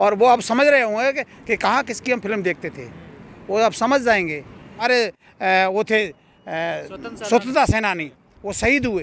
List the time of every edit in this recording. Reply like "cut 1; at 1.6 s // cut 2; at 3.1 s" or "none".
cut 1; at 4.9 s